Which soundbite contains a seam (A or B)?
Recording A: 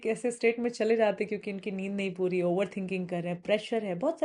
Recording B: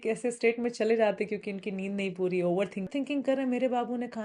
B